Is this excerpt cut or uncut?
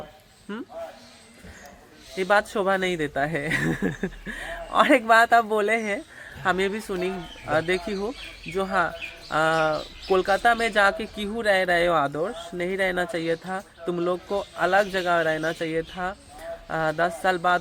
uncut